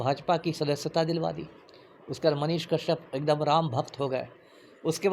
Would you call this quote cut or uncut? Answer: uncut